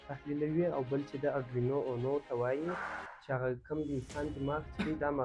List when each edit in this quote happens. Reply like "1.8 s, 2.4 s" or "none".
none